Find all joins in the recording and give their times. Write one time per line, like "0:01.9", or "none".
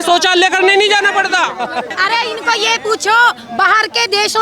0:01.9